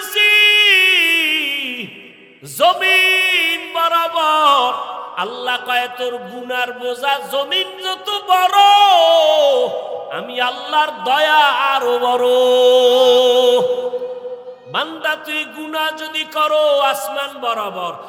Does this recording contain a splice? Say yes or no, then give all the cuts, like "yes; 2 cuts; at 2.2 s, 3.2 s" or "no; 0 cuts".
no; 0 cuts